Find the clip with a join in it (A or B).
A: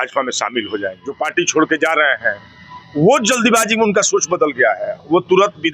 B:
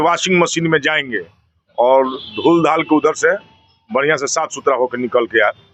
A